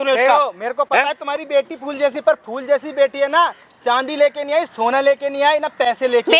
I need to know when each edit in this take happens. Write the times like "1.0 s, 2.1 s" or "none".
none